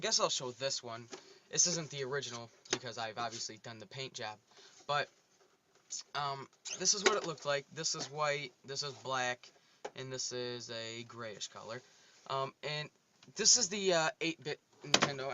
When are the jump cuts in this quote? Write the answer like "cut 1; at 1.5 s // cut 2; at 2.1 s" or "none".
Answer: cut 1; at 4.2 s